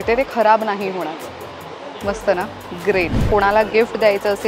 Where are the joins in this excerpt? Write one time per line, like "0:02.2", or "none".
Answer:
0:03.2